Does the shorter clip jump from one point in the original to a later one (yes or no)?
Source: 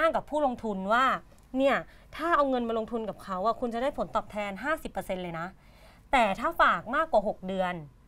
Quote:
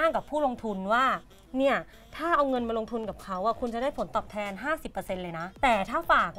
yes